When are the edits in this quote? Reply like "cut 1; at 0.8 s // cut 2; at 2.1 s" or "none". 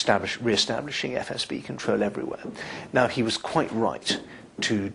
none